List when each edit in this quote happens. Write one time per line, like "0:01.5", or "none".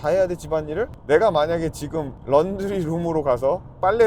0:00.9

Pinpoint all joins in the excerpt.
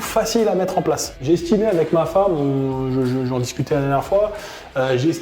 0:01.1

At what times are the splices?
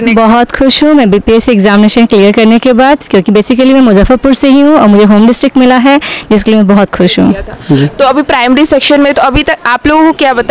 0:07.4

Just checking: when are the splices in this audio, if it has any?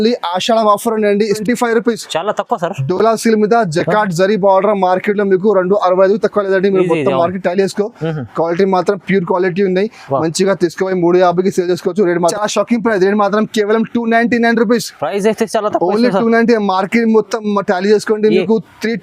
0:01.3
0:12.3

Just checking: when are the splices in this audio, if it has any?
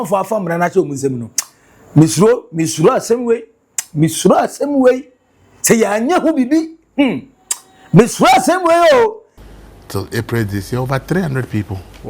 0:09.3

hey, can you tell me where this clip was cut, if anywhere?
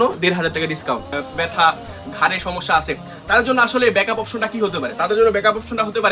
0:01.2

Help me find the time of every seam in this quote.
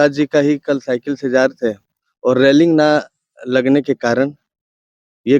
none

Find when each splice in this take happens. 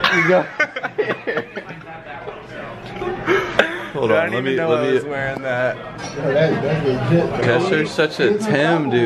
0:07.4

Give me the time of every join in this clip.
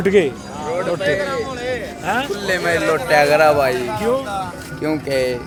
none

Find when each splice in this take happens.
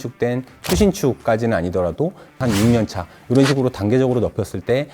0:02.4

